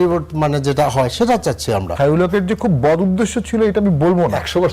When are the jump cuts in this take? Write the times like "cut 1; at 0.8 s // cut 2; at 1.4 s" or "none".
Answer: cut 1; at 1.9 s